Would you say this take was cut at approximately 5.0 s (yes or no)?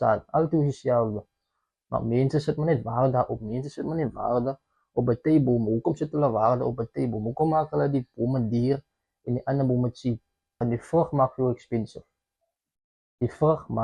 no